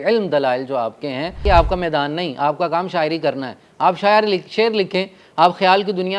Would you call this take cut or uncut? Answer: cut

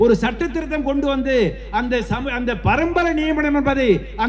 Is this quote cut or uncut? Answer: uncut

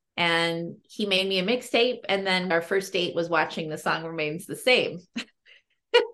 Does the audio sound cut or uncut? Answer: cut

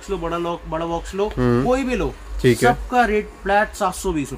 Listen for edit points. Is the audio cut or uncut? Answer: uncut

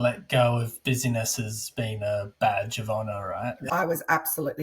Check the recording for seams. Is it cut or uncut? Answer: cut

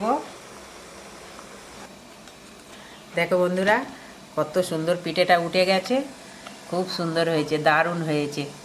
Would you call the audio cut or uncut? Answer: cut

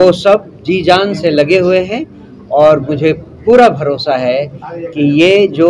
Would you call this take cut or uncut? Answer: uncut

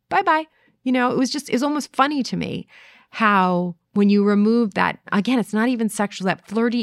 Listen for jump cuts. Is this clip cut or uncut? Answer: cut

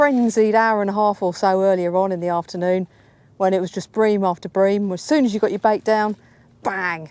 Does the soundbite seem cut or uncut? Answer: uncut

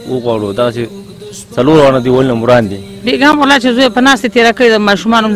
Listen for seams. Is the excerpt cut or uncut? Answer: cut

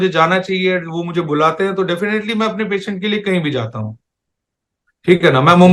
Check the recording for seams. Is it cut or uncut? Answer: uncut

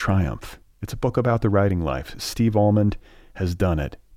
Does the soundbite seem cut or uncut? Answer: uncut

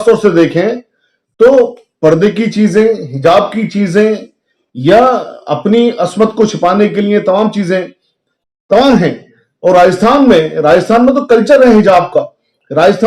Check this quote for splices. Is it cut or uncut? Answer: uncut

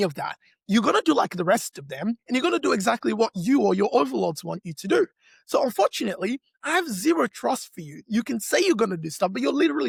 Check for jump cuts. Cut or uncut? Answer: uncut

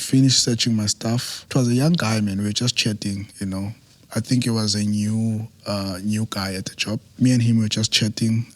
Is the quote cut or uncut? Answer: cut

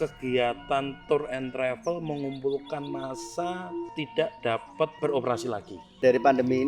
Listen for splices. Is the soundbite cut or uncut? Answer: cut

